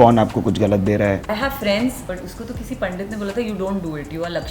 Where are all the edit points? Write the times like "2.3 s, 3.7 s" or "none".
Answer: 1.2 s, 2.0 s